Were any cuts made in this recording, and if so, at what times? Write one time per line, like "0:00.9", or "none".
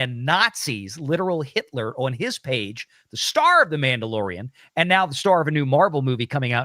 none